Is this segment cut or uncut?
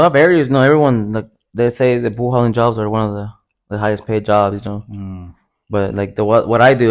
uncut